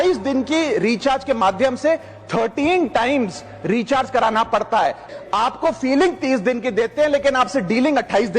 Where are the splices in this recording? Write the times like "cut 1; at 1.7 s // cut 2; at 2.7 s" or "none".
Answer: cut 1; at 5.1 s